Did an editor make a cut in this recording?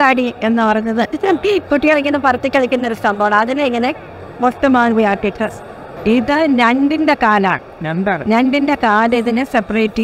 yes; 1 cut; at 5.8 s

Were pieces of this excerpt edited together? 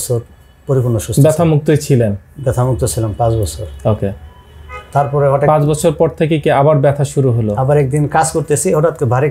no; 0 cuts

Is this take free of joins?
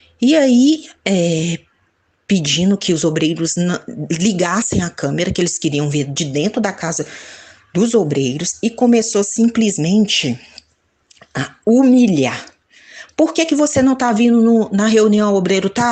yes; 0 cuts

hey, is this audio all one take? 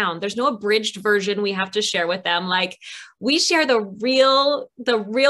yes; 0 cuts

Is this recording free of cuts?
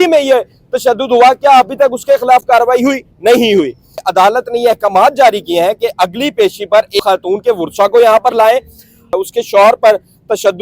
no; 3 cuts; at 4.1 s, 7.0 s, 9.1 s

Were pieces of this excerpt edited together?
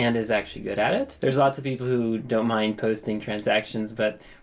yes; 1 cut; at 1.1 s

